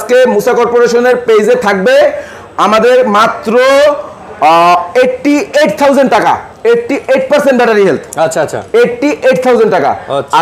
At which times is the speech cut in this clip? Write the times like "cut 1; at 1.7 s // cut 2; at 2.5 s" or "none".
none